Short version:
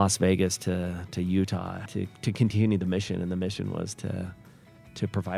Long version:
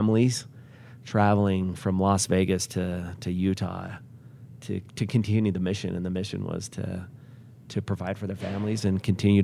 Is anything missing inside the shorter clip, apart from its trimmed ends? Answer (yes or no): yes